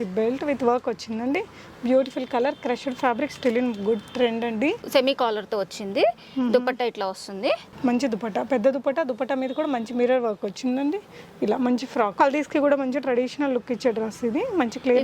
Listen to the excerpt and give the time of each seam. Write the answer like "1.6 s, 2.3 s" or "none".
4.8 s, 7.7 s, 12.1 s